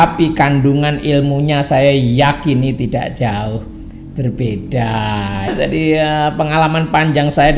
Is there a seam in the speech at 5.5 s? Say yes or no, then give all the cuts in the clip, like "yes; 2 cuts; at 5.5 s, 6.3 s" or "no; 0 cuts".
yes; 1 cut; at 5.5 s